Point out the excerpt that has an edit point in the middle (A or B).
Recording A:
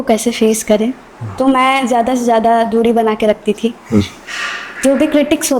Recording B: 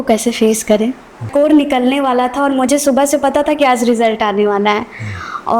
B